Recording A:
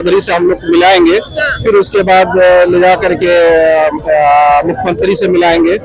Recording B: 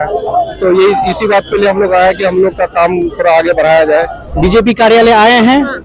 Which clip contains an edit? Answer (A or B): B